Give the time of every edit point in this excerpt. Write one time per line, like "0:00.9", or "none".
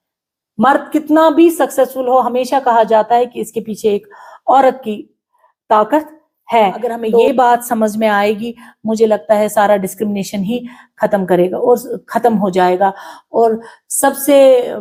none